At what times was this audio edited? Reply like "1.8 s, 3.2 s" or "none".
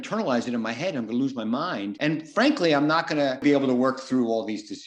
1.9 s, 3.4 s